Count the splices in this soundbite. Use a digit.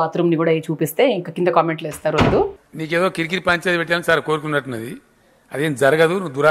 0